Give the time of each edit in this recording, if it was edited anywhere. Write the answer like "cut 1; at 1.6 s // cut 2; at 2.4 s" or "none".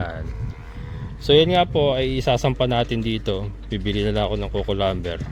none